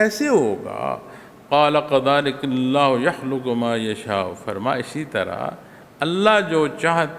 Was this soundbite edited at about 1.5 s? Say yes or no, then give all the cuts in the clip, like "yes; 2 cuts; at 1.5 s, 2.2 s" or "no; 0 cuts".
no; 0 cuts